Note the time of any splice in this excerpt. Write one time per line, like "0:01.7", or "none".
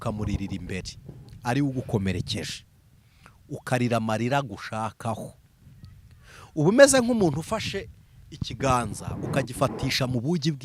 none